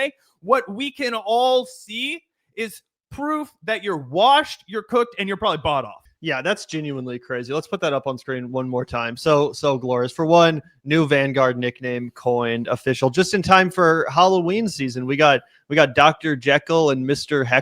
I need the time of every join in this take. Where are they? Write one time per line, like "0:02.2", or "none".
0:06.0